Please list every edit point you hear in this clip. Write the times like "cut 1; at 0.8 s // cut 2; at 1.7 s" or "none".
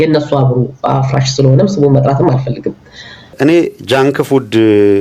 cut 1; at 3.0 s